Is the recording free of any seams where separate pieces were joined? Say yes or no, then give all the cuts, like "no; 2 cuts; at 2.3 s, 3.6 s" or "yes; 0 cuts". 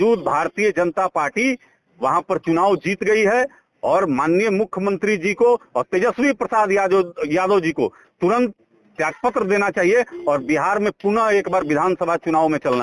yes; 0 cuts